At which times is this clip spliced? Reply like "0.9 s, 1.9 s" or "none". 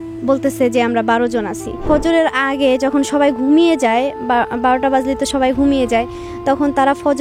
1.8 s